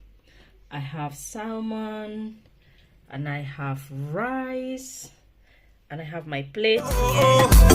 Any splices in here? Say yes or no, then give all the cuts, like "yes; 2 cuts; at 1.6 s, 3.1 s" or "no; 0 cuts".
yes; 1 cut; at 6.8 s